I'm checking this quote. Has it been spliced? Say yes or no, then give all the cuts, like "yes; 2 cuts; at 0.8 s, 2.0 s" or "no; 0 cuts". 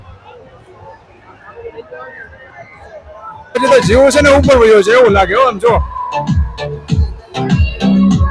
yes; 1 cut; at 3.6 s